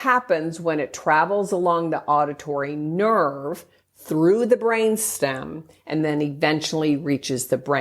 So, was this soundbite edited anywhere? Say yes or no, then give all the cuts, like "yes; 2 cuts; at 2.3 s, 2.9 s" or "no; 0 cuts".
no; 0 cuts